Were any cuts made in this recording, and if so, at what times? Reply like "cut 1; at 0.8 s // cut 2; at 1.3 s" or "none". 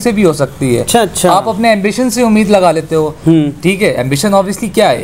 none